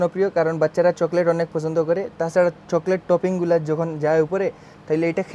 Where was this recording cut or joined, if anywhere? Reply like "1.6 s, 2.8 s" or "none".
none